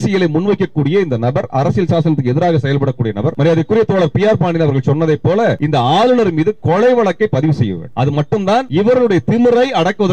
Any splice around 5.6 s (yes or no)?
yes